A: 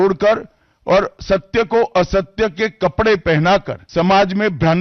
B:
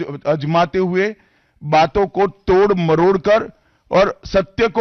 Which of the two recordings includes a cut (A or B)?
A